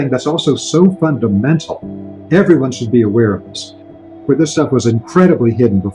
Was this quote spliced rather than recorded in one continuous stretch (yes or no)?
yes